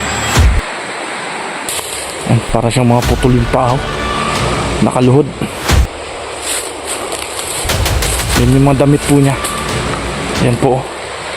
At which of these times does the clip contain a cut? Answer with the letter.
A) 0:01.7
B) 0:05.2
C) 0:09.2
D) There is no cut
A